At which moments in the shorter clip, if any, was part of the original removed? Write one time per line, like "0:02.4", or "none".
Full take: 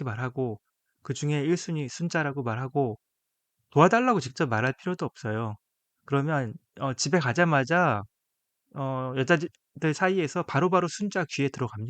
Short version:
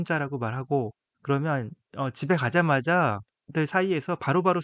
0:01.1
0:03.3